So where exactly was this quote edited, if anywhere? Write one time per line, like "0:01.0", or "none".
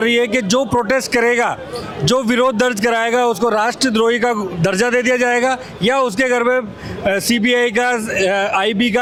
none